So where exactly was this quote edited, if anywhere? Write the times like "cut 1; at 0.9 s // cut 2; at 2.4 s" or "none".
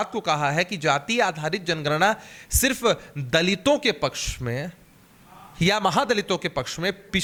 none